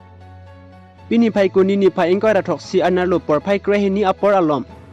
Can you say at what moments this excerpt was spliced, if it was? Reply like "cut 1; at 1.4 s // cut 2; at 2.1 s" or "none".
cut 1; at 0.9 s